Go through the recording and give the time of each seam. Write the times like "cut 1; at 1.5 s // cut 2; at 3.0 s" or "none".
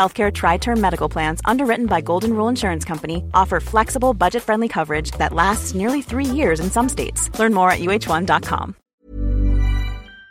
cut 1; at 8.9 s